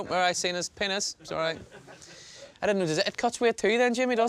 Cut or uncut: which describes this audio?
uncut